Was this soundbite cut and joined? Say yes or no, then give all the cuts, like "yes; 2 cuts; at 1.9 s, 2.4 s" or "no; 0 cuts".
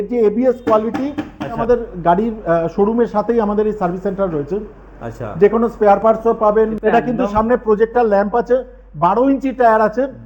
yes; 2 cuts; at 1.6 s, 6.8 s